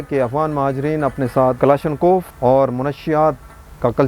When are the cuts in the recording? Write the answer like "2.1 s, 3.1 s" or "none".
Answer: 1.6 s, 2.3 s